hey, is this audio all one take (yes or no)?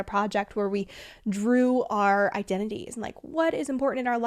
yes